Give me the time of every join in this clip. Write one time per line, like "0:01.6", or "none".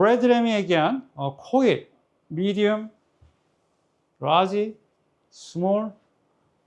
none